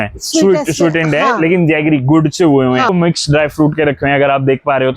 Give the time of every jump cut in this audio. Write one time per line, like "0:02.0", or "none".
0:02.9